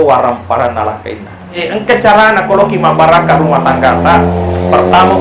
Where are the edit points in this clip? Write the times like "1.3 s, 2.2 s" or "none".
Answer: 1.6 s